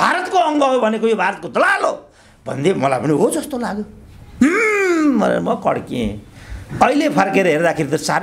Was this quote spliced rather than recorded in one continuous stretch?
no; 0 cuts

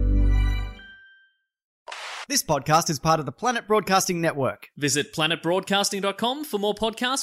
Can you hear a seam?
yes; 1 cut; at 1.8 s

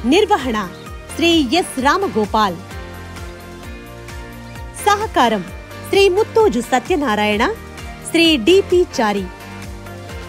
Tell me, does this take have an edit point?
no; 0 cuts

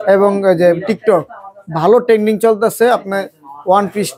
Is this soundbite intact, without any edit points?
yes; 0 cuts

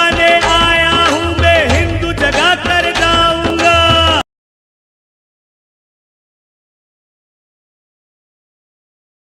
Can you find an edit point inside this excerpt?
no; 0 cuts

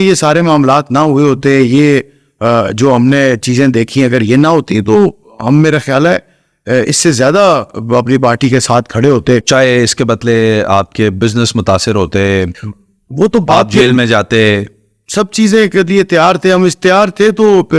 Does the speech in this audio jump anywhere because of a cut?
no; 0 cuts

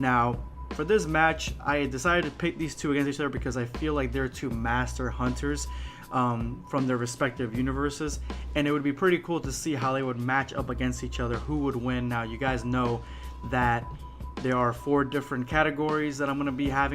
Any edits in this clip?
yes; 1 cut; at 7.4 s

